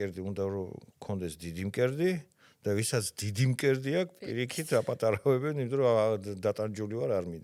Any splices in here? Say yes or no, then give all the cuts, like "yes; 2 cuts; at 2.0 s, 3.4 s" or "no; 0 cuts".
no; 0 cuts